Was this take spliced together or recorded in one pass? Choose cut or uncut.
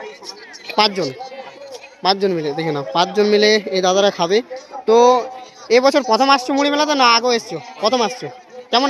uncut